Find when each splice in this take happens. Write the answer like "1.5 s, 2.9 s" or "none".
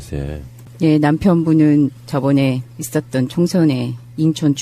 3.1 s